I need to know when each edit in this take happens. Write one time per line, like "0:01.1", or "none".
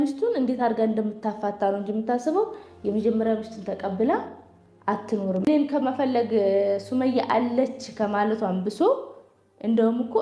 0:05.5